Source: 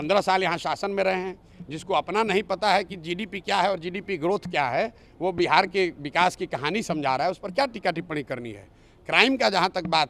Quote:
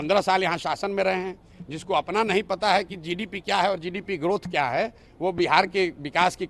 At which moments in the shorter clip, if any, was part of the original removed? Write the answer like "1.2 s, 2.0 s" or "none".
none